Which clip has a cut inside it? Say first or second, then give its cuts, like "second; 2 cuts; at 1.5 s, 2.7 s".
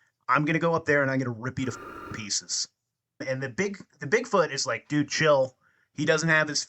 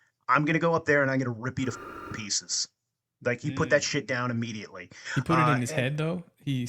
first; 1 cut; at 3.2 s